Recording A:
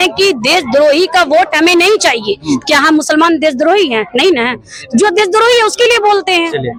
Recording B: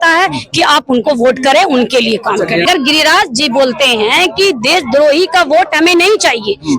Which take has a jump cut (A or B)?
B